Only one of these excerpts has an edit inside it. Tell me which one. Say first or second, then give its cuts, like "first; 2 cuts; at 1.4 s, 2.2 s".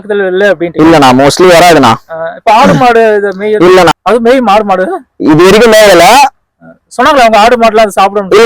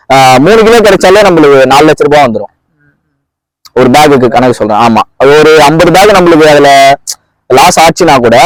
first; 1 cut; at 3.9 s